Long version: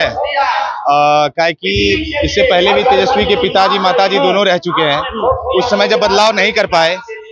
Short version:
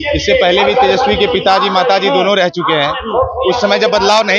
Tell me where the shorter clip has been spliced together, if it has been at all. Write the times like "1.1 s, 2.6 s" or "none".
none